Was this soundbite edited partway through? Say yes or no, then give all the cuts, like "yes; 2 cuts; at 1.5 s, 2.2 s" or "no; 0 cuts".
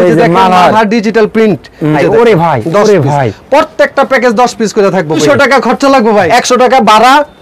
yes; 3 cuts; at 2.0 s, 5.2 s, 6.3 s